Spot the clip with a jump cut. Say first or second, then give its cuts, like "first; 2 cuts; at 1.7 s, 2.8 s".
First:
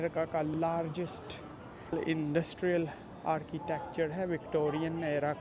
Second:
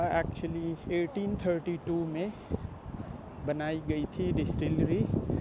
first; 1 cut; at 1.9 s